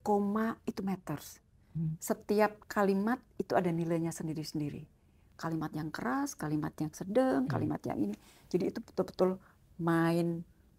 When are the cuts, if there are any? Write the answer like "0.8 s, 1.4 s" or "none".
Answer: none

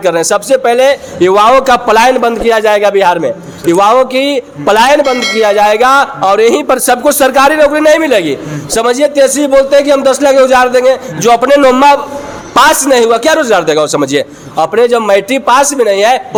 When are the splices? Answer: none

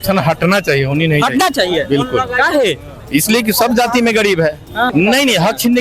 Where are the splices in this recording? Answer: 4.9 s

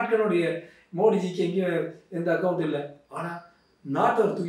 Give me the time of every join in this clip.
none

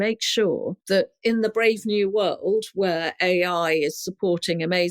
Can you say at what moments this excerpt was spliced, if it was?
1.1 s

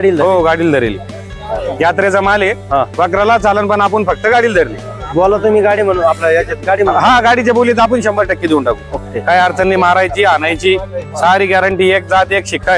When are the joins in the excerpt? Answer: none

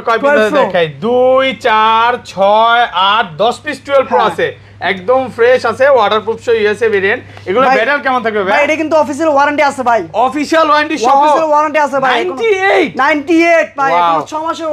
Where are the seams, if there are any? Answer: none

